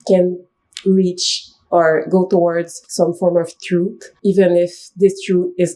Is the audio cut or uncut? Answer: cut